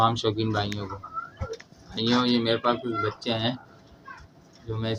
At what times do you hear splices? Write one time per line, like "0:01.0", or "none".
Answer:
none